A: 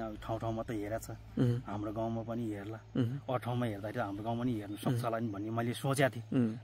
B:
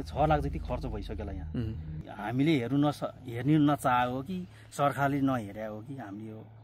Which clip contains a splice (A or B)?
B